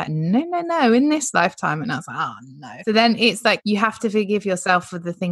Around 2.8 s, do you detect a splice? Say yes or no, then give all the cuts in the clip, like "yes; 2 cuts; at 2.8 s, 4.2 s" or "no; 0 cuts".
yes; 2 cuts; at 2.8 s, 3.6 s